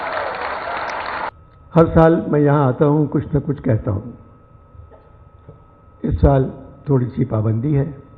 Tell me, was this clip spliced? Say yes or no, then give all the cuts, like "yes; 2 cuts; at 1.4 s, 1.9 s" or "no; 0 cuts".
yes; 1 cut; at 1.3 s